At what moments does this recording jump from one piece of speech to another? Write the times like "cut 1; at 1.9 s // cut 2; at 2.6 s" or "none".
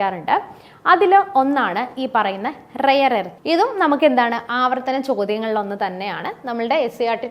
cut 1; at 3.3 s